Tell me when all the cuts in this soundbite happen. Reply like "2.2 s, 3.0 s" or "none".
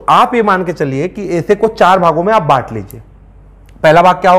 none